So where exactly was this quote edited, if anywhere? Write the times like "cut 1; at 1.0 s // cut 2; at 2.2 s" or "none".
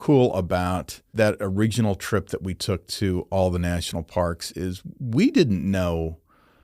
cut 1; at 1.1 s